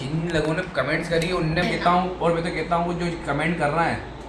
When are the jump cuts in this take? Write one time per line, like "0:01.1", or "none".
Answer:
0:01.6